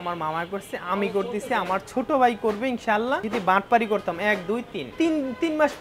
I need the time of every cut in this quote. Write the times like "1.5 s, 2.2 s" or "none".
3.2 s, 4.9 s

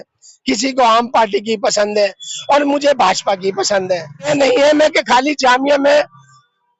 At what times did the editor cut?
4.3 s

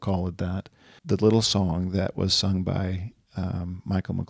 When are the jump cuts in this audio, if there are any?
1.0 s

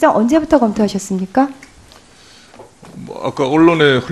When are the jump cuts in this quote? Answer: 2.2 s

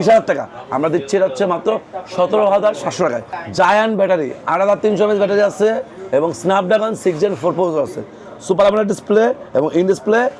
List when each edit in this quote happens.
3.3 s

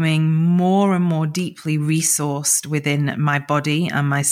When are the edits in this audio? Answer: none

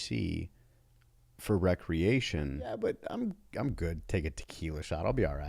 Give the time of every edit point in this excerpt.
2.8 s

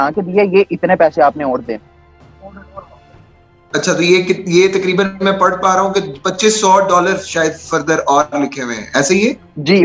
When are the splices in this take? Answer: none

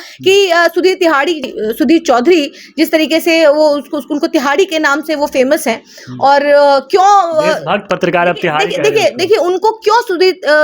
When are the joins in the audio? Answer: 1.5 s

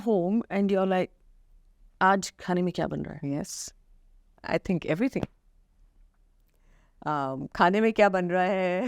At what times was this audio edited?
none

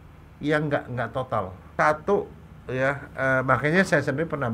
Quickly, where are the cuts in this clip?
1.7 s

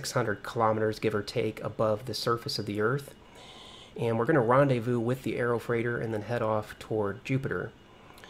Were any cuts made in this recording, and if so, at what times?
5.5 s

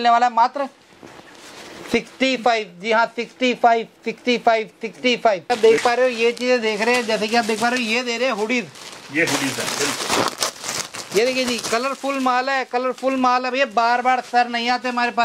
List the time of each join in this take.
5.6 s

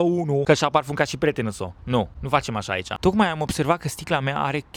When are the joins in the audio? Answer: none

